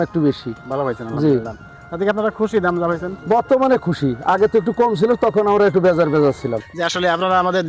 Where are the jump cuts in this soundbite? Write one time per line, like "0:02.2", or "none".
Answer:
0:06.7